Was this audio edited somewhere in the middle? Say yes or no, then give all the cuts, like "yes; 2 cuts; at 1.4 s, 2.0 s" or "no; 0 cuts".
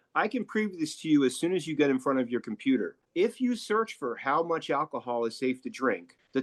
no; 0 cuts